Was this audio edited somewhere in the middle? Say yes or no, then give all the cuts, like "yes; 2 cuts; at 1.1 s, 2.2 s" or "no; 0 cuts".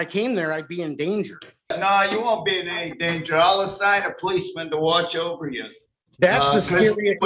yes; 1 cut; at 1.7 s